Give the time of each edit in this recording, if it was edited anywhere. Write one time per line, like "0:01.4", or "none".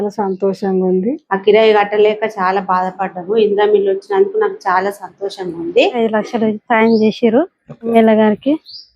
0:01.2
0:05.9
0:07.9